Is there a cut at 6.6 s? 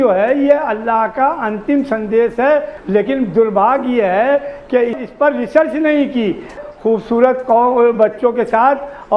yes; 2 cuts; at 2.7 s, 6.6 s

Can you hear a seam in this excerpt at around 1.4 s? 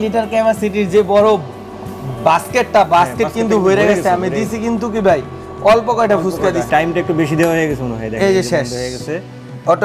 no; 0 cuts

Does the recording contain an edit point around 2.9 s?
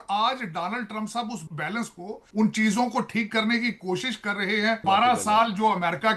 no; 2 cuts; at 1.5 s, 4.8 s

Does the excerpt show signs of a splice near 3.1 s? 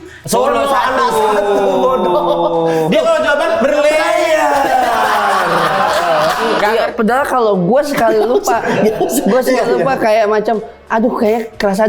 no; 1 cut; at 6.7 s

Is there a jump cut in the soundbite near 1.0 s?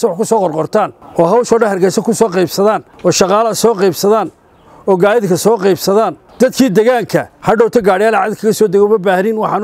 yes; 3 cuts; at 1.0 s, 2.9 s, 7.3 s

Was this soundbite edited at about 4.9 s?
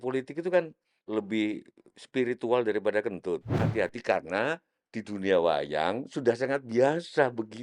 no; 2 cuts; at 0.9 s, 3.6 s

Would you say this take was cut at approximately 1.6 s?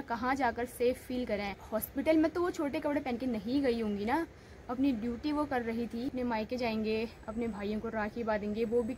yes; 2 cuts; at 1.6 s, 6.2 s

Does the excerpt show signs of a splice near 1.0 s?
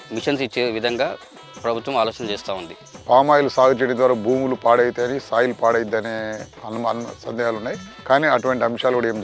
no; 0 cuts

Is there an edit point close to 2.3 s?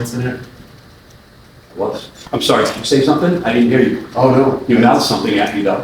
yes; 1 cut; at 2.3 s

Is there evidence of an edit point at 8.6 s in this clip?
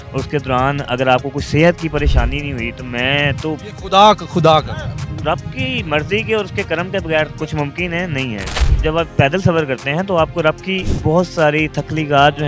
yes; 1 cut; at 8.6 s

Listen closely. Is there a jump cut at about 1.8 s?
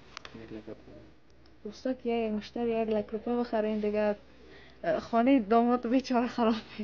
no; 0 cuts

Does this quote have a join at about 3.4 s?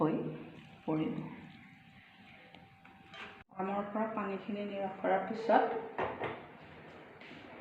yes; 1 cut; at 3.4 s

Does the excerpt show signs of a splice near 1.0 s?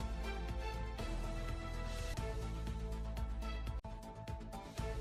no; 0 cuts

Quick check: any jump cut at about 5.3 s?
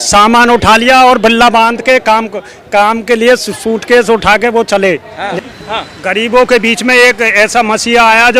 yes; 1 cut; at 5.3 s

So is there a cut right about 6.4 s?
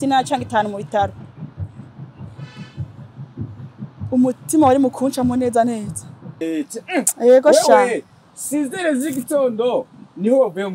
yes; 1 cut; at 6.4 s

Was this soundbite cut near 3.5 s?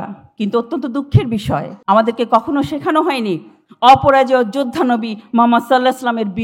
no; 1 cut; at 1.7 s

